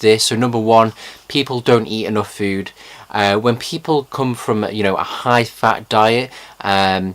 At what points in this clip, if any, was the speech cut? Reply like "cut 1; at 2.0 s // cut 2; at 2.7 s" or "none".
cut 1; at 1.5 s